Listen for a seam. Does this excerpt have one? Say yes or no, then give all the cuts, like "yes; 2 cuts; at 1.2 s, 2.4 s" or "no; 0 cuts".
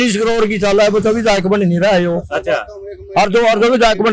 no; 0 cuts